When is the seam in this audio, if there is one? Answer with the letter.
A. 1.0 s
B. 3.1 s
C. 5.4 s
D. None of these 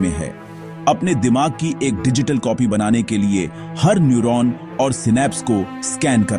D